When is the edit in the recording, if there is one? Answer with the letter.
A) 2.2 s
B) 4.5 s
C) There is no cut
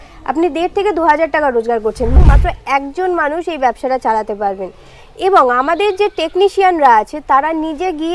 A